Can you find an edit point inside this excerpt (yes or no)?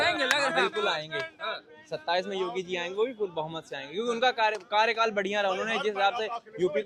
no